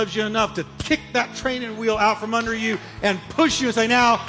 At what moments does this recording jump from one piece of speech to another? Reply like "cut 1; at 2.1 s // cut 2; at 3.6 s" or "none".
none